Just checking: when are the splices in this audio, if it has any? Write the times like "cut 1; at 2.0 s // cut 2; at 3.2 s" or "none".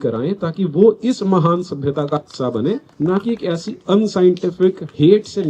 cut 1; at 2.9 s